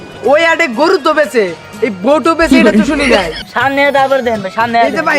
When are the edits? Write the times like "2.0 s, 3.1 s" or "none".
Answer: 3.4 s